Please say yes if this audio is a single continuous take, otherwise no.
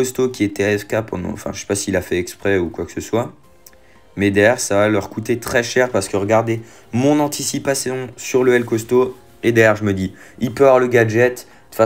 yes